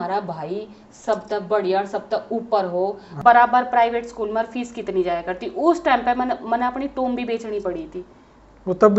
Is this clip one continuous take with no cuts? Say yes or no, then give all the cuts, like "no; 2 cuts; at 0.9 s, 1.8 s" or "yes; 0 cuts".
no; 1 cut; at 3.1 s